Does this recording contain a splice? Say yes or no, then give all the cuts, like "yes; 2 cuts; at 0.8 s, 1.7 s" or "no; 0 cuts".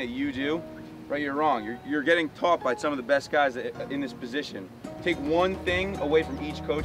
no; 0 cuts